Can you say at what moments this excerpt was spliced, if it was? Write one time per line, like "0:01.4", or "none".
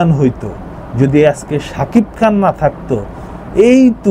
none